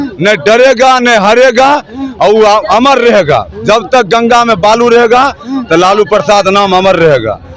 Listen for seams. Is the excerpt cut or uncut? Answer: uncut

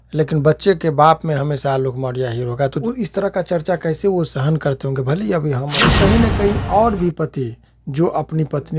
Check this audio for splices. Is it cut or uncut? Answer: cut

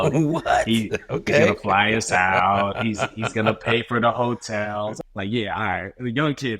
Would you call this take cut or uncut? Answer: cut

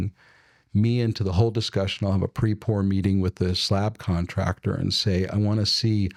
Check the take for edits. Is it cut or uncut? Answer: uncut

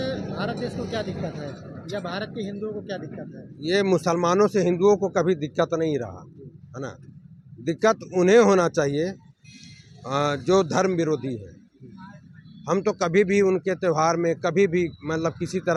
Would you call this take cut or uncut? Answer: uncut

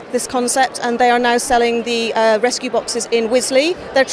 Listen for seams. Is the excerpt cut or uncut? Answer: uncut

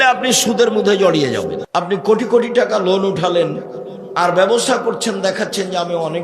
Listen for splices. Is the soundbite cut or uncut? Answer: cut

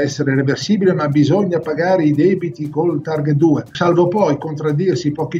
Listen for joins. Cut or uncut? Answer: cut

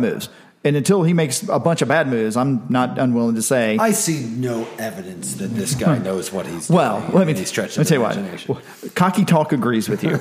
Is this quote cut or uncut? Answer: uncut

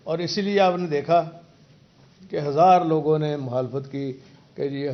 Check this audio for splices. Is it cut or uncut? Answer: uncut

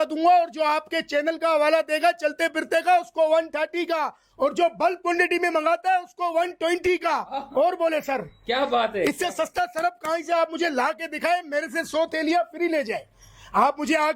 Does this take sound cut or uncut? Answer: uncut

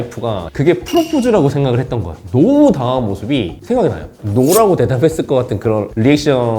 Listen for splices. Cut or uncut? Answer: cut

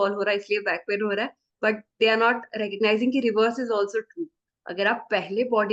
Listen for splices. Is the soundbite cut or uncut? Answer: uncut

